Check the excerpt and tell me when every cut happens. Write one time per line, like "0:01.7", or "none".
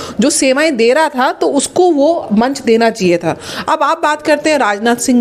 none